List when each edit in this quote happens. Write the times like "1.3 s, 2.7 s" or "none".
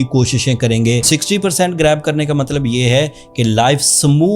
1.1 s